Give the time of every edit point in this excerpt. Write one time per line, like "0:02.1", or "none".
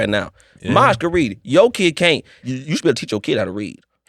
0:02.3